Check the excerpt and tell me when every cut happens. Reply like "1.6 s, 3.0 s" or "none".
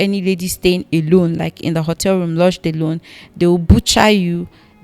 none